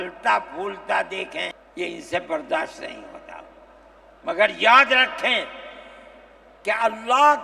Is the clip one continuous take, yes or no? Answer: no